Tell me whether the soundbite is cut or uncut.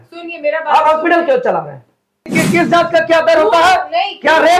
cut